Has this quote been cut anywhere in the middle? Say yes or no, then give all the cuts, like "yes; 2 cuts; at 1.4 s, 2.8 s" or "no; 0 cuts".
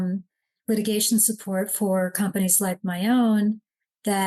no; 0 cuts